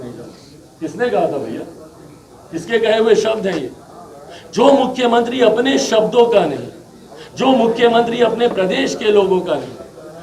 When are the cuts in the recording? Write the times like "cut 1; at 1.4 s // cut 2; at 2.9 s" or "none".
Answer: none